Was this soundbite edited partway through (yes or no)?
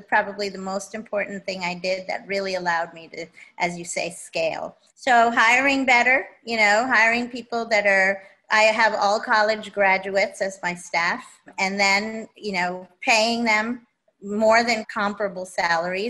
yes